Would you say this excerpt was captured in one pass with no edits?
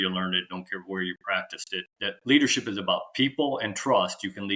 no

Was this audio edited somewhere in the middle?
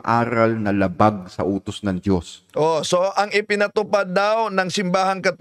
no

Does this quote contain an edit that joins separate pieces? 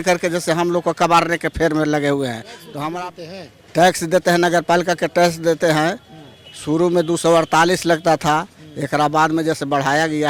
yes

